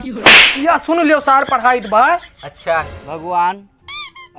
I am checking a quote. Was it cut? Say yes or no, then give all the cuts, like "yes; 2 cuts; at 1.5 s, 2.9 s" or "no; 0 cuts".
yes; 1 cut; at 3.0 s